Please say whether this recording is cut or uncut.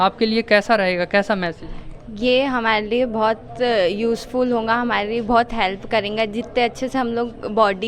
uncut